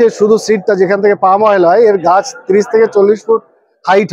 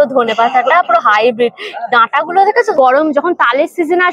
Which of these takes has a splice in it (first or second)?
second